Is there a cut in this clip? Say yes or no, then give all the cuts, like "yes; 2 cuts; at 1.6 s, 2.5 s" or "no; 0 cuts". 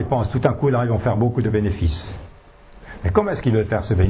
no; 0 cuts